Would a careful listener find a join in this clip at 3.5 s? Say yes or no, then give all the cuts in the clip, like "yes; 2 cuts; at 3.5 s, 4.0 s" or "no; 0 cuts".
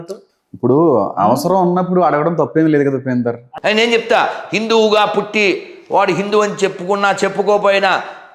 yes; 1 cut; at 3.5 s